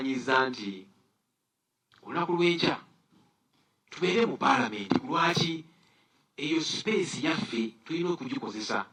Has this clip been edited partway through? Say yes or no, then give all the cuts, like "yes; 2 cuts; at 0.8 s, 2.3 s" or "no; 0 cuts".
no; 0 cuts